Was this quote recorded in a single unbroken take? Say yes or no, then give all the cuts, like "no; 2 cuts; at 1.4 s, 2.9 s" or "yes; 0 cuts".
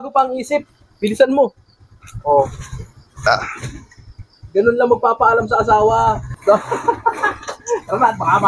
no; 1 cut; at 6.4 s